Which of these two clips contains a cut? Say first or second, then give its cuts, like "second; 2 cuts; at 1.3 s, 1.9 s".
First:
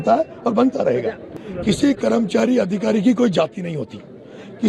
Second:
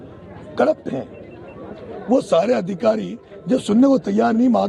first; 1 cut; at 1.3 s